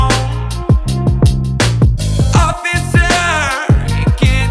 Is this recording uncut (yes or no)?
yes